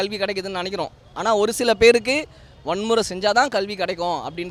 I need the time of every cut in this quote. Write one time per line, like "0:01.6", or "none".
none